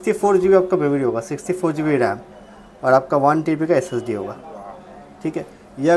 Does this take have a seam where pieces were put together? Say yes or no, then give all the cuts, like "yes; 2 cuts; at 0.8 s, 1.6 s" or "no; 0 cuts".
no; 0 cuts